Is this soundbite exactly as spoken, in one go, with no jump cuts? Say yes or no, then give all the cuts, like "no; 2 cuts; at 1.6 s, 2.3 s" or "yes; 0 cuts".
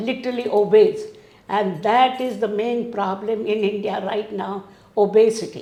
yes; 0 cuts